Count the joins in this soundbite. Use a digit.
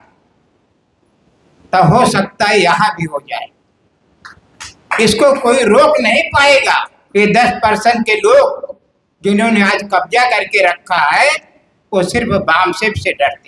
1